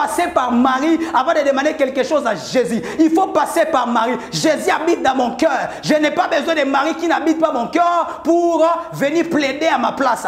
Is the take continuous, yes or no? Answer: yes